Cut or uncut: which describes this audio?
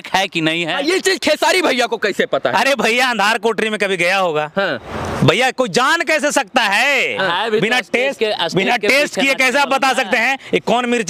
uncut